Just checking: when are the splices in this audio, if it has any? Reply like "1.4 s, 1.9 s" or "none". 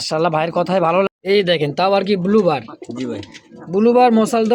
1.1 s